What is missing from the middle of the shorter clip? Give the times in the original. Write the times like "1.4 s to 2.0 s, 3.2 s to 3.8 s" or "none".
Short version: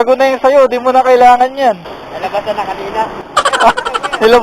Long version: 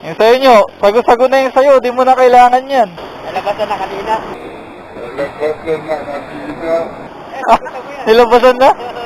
4.4 s to 7.1 s